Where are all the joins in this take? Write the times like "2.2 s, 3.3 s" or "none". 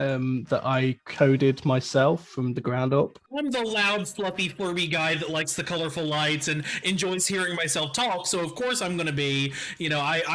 3.2 s